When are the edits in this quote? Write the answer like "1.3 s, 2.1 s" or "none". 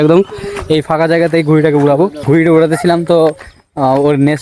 2.2 s